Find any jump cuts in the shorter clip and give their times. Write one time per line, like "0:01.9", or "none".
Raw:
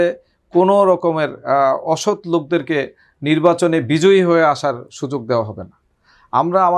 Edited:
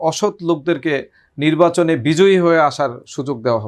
none